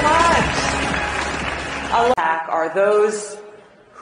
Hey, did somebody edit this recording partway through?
no; 0 cuts

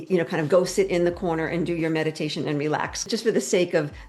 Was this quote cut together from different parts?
yes; 1 cut; at 3.1 s

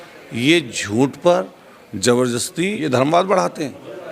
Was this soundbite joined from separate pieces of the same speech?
yes; 1 cut; at 2.8 s

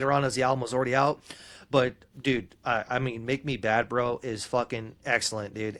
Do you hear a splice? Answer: no; 0 cuts

